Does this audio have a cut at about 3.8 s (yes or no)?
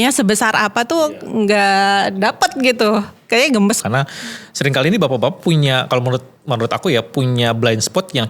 yes